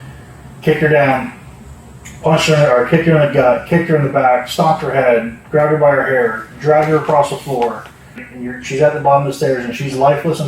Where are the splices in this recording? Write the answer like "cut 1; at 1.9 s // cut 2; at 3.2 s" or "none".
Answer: cut 1; at 8.2 s

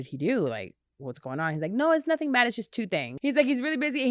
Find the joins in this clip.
cut 1; at 3.1 s

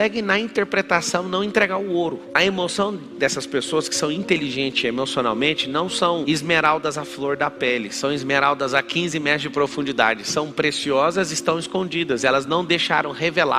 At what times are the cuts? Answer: none

